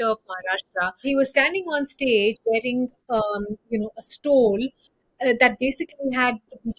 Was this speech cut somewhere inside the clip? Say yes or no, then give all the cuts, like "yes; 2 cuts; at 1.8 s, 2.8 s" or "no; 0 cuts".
yes; 1 cut; at 1.0 s